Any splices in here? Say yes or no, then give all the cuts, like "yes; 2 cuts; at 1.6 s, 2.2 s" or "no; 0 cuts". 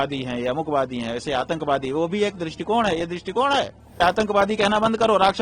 yes; 1 cut; at 4.0 s